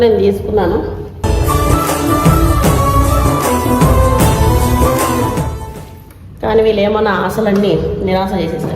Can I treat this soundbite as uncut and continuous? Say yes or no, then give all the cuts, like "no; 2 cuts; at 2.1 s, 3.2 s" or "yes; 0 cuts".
yes; 0 cuts